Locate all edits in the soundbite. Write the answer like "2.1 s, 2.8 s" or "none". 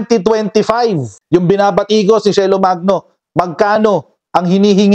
1.2 s